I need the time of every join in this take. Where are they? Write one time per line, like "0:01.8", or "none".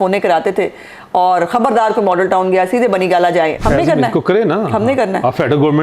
0:03.6